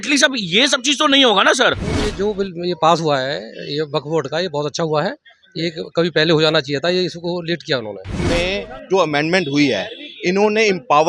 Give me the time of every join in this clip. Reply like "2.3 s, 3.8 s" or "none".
1.9 s, 8.2 s